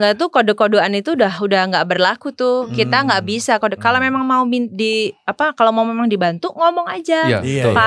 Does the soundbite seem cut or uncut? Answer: uncut